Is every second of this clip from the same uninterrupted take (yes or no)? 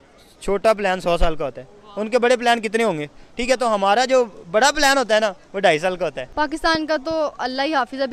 no